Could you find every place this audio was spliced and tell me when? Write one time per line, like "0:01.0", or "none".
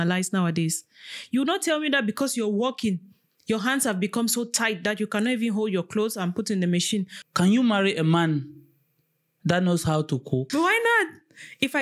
0:07.2
0:10.5